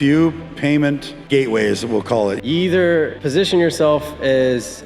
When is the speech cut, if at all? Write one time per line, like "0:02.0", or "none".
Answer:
0:01.1
0:02.4
0:03.2